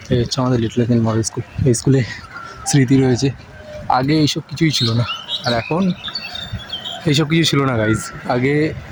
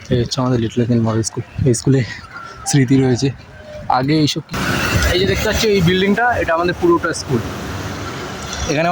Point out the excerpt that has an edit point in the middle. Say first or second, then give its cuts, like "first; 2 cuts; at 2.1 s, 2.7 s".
second; 1 cut; at 4.5 s